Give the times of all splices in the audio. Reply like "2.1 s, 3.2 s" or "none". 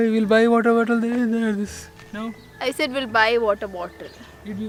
none

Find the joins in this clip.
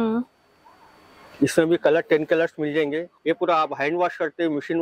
3.1 s

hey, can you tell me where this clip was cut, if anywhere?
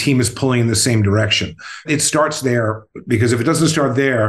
1.8 s

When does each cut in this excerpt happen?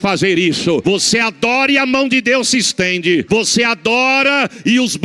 0.8 s, 3.3 s

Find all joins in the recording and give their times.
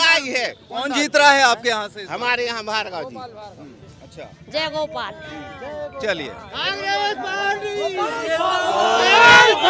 3.9 s

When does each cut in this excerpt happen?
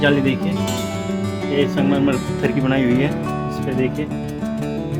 none

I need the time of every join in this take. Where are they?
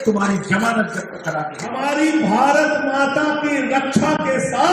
1.8 s

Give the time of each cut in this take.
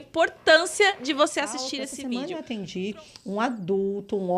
1.9 s

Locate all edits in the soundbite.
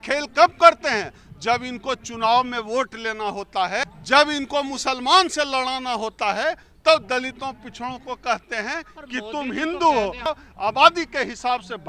3.8 s, 10.3 s

